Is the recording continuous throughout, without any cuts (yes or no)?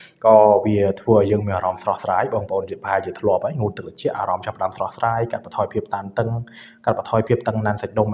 yes